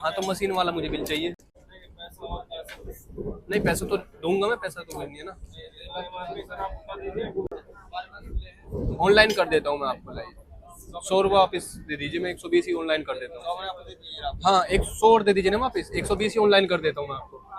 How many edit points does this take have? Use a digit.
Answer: 0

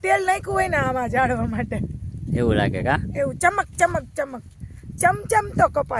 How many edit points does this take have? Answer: 0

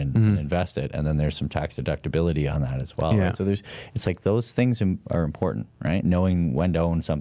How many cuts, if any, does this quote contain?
0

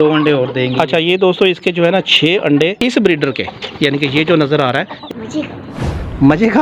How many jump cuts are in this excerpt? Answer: 1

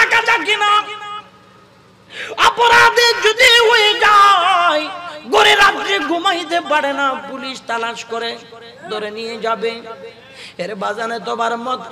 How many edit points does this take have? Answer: 0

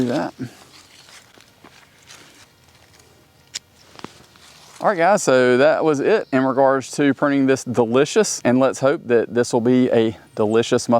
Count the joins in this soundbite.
1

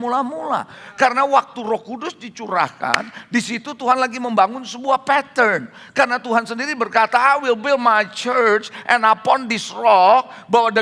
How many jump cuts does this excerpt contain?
0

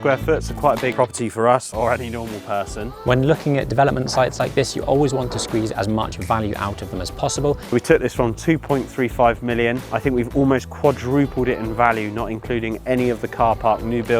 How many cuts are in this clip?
4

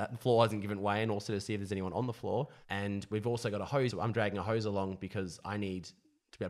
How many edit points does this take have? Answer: 2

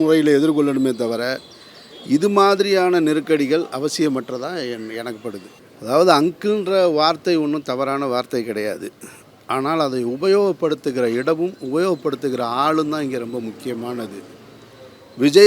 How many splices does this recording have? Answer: 1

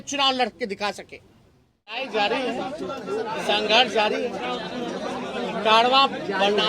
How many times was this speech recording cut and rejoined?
1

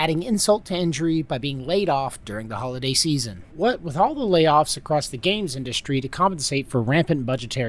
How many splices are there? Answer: 1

